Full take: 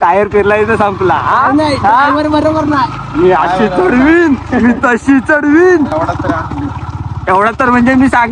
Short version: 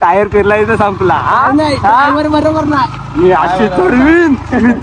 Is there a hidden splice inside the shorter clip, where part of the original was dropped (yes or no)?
no